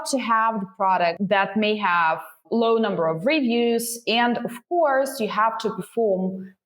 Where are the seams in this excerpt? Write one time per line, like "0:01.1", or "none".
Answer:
0:01.2
0:02.4